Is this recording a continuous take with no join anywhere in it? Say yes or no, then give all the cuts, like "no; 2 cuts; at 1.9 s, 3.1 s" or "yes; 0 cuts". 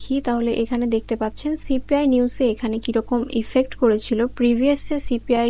yes; 0 cuts